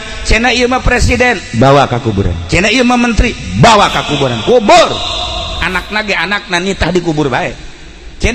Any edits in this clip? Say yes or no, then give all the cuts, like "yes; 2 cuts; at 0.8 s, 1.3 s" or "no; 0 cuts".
no; 0 cuts